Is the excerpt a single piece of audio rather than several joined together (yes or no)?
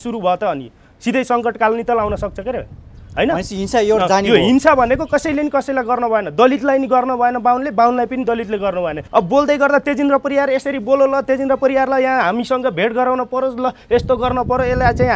no